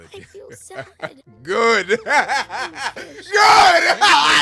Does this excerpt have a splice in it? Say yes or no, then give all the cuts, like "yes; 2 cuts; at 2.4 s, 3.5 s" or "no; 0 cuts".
no; 0 cuts